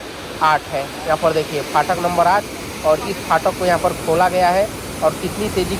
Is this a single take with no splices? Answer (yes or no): yes